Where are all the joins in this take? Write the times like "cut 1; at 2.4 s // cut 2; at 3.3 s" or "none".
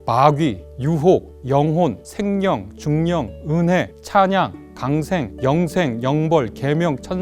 cut 1; at 1.2 s // cut 2; at 2.1 s // cut 3; at 4.0 s // cut 4; at 5.3 s